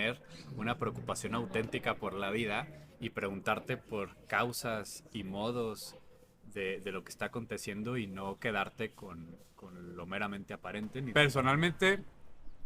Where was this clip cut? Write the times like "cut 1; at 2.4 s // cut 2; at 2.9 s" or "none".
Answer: cut 1; at 11.0 s